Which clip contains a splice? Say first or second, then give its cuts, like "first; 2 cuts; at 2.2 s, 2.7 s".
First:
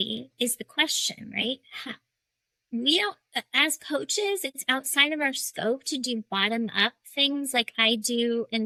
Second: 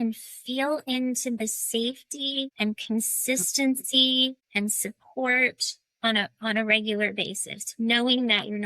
second; 2 cuts; at 2.5 s, 4.4 s